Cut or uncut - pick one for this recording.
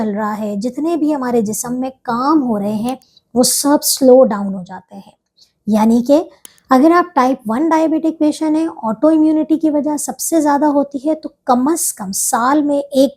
cut